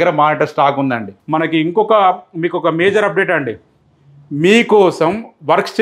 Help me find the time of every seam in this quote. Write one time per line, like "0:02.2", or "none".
0:01.1